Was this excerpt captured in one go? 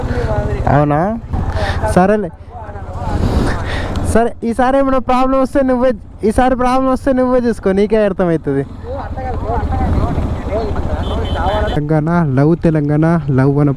no; 2 cuts; at 1.4 s, 11.8 s

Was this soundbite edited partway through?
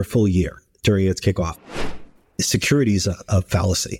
yes; 1 cut; at 1.7 s

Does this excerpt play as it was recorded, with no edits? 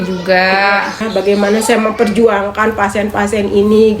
no; 1 cut; at 1.0 s

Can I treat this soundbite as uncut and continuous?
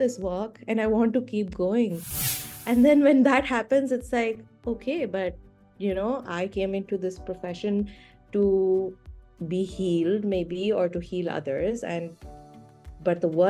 no; 1 cut; at 2.1 s

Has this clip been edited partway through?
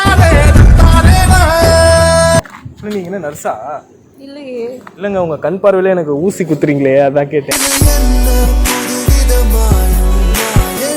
yes; 1 cut; at 2.4 s

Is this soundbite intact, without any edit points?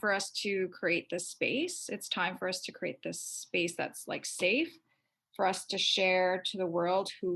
yes; 0 cuts

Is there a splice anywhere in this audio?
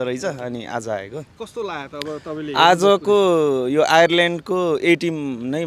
no; 0 cuts

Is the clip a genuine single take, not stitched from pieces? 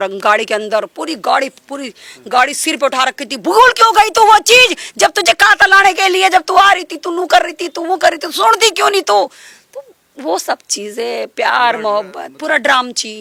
yes; 0 cuts

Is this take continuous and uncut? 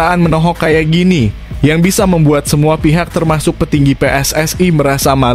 yes; 0 cuts

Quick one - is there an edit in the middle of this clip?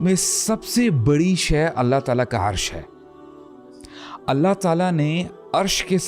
no; 0 cuts

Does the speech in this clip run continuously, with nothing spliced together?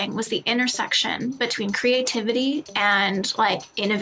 yes; 0 cuts

